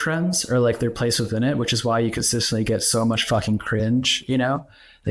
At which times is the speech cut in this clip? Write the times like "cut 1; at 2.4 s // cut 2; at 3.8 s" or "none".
none